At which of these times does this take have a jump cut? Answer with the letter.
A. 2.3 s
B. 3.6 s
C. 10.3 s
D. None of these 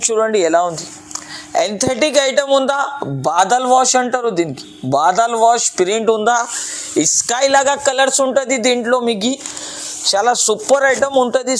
D